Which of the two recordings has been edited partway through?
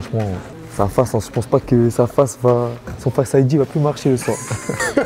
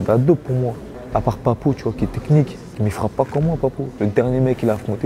second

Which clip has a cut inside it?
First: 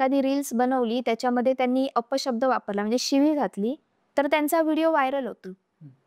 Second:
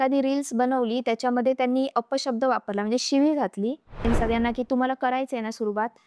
second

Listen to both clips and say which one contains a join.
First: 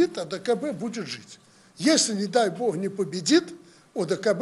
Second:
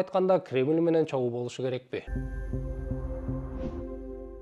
second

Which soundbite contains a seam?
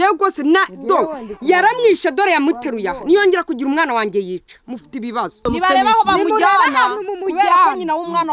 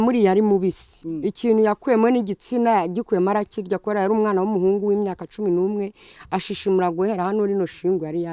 first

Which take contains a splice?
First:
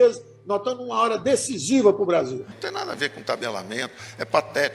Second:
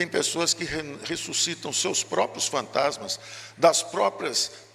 first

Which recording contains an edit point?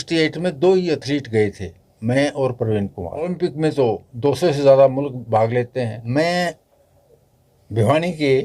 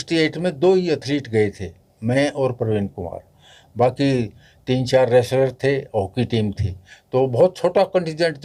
first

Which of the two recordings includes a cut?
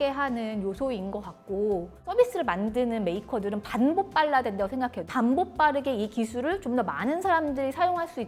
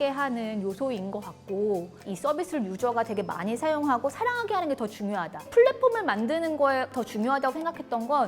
second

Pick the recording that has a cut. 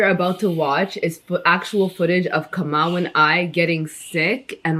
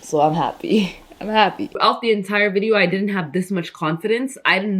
second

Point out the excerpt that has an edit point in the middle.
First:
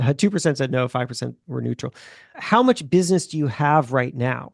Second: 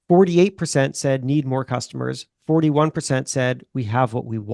first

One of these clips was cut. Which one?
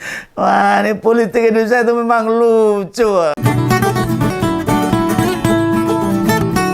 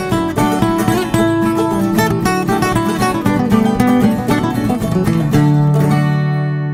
first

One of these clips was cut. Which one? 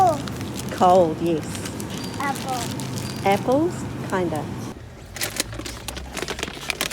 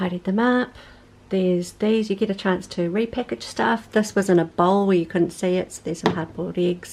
first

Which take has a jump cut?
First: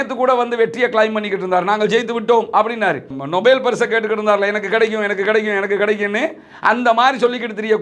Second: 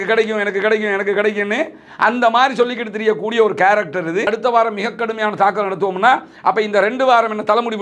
second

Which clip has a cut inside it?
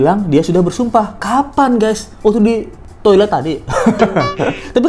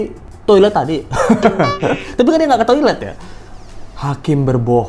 second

